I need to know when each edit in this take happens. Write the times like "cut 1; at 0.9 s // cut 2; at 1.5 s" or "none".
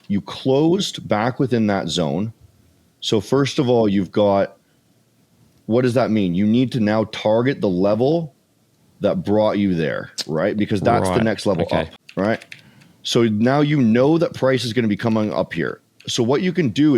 cut 1; at 12.0 s